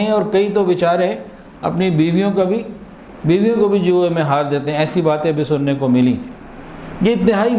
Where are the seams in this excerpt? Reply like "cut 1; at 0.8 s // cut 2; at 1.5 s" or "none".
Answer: none